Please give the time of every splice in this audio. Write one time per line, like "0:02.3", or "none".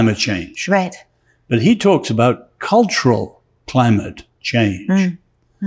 none